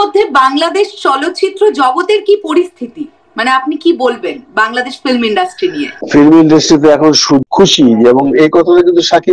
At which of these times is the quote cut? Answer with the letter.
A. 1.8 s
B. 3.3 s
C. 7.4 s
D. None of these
C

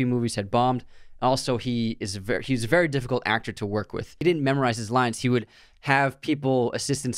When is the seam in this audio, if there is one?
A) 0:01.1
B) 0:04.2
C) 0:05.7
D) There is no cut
B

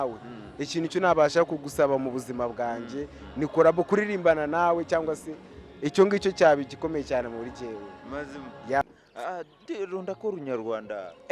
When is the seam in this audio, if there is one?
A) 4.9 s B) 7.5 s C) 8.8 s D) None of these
C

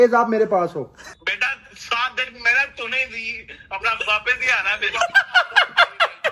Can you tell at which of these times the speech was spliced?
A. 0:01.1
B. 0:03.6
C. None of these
A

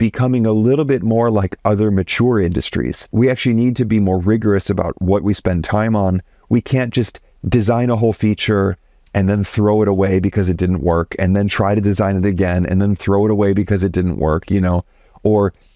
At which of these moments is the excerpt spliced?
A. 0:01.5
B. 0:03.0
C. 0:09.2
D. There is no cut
B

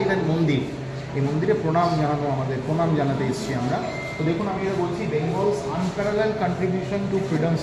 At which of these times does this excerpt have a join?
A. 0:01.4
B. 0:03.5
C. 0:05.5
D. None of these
D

